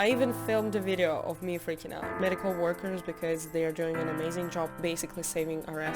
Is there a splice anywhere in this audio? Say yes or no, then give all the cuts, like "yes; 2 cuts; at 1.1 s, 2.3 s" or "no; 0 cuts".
yes; 2 cuts; at 2.1 s, 4.7 s